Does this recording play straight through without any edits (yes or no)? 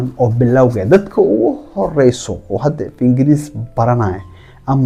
yes